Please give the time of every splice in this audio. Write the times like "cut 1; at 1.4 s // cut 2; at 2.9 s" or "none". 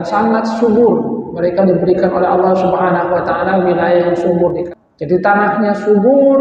cut 1; at 4.7 s